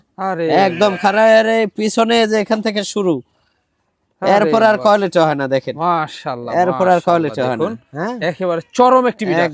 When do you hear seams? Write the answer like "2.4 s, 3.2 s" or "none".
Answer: none